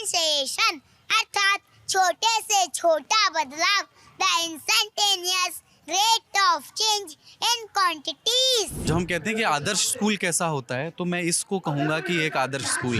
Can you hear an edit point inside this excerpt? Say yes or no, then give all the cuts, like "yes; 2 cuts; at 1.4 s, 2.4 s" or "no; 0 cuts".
yes; 1 cut; at 8.8 s